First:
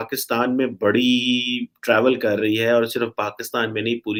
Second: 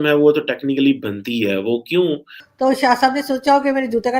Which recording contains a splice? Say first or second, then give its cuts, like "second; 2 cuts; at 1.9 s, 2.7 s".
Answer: second; 1 cut; at 2.4 s